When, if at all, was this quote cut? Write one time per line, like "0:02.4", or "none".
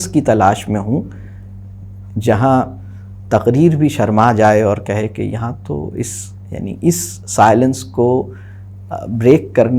none